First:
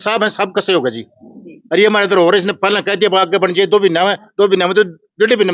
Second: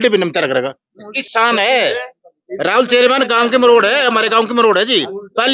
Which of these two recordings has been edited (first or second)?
second